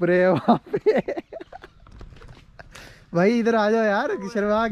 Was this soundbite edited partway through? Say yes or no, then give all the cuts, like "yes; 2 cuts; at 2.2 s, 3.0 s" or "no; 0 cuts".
no; 0 cuts